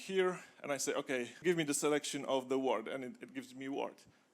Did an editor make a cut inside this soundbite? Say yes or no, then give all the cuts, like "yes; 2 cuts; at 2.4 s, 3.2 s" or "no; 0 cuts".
yes; 1 cut; at 1.3 s